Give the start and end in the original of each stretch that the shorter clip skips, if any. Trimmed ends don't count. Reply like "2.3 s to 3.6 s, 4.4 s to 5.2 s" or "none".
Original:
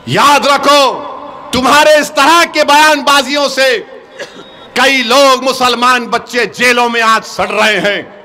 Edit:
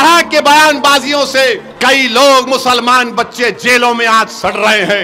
3.9 s to 4.6 s